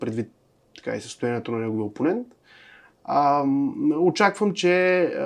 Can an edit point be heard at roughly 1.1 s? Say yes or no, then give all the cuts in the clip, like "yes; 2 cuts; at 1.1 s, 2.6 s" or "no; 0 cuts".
no; 0 cuts